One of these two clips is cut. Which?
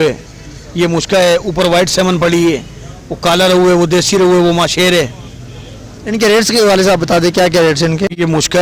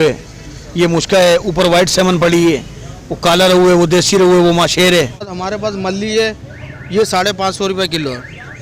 second; 1 cut; at 5.4 s

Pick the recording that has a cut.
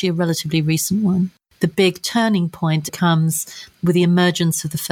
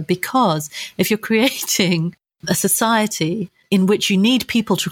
first; 2 cuts; at 1.4 s, 2.9 s

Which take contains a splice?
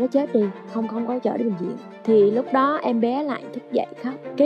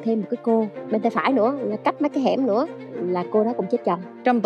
first; 1 cut; at 1.7 s

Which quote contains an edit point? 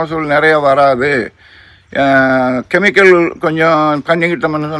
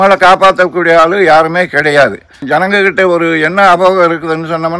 second; 1 cut; at 2.4 s

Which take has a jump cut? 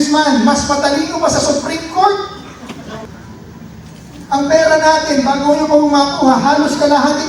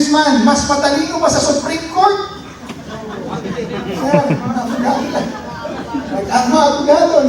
first; 1 cut; at 3.0 s

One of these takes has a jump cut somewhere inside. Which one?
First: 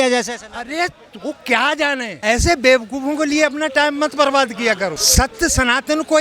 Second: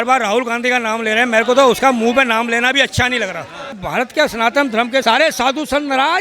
second; 2 cuts; at 3.8 s, 5.0 s

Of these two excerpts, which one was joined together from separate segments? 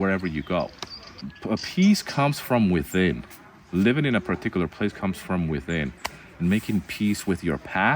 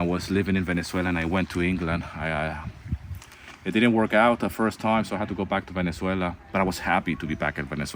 first; 1 cut; at 1.3 s

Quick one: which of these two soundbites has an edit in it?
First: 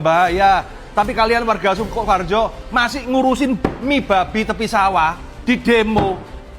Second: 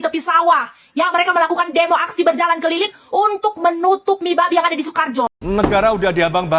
second; 1 cut; at 5.4 s

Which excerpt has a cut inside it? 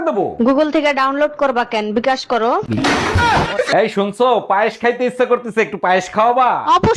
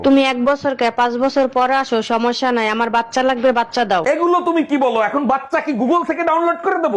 first; 1 cut; at 3.7 s

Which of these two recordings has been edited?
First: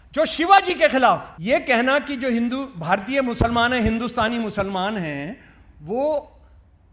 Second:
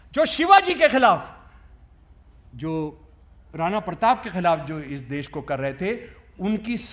first; 1 cut; at 1.3 s

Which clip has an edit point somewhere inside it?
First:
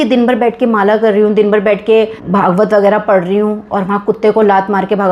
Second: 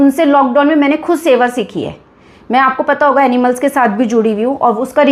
first; 1 cut; at 2.2 s

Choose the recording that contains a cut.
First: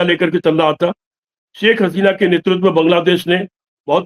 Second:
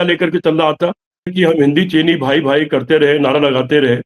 second; 1 cut; at 1.3 s

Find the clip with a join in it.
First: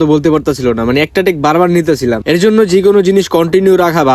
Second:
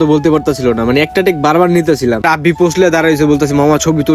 second; 1 cut; at 2.2 s

